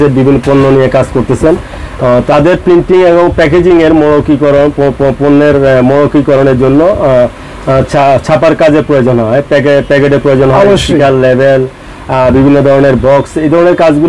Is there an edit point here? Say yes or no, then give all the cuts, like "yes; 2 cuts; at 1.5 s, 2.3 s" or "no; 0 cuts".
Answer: no; 0 cuts